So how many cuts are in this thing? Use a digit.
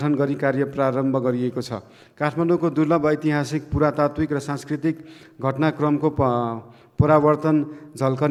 0